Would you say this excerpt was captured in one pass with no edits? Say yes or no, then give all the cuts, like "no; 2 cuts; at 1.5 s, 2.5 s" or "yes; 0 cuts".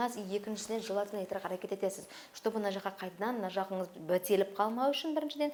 yes; 0 cuts